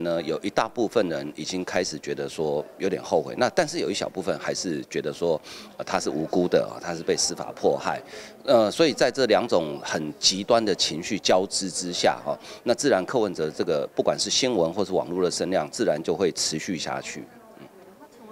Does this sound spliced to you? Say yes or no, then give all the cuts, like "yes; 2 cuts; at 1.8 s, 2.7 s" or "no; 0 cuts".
no; 0 cuts